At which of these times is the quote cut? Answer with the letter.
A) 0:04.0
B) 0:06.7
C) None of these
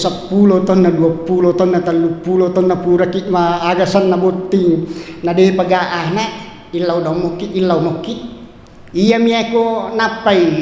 C